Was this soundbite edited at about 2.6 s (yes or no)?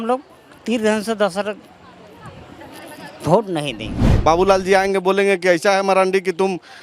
no